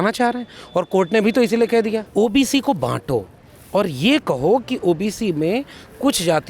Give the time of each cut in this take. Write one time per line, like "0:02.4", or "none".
0:02.0